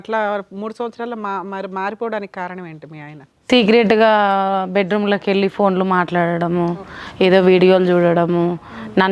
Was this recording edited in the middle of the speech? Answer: no; 0 cuts

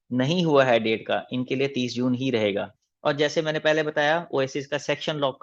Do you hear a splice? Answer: yes; 1 cut; at 2.7 s

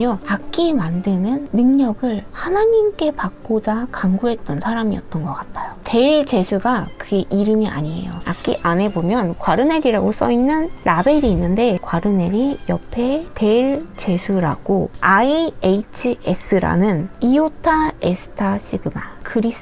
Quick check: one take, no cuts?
no; 4 cuts; at 5.8 s, 8.2 s, 14.9 s, 17.1 s

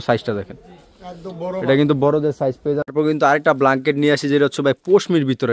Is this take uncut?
no; 1 cut; at 2.9 s

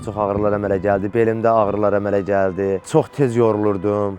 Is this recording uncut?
no; 1 cut; at 2.8 s

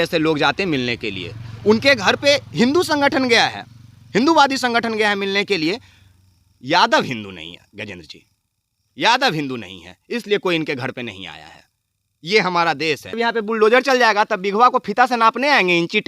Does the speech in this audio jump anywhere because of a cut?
yes; 1 cut; at 13.2 s

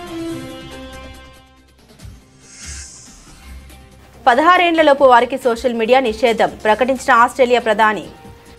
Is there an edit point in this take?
no; 0 cuts

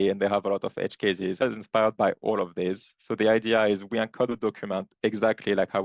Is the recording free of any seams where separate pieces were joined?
no; 1 cut; at 1.4 s

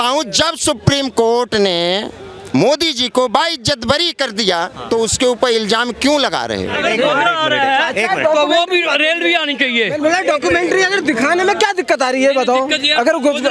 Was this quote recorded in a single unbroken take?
no; 1 cut; at 6.8 s

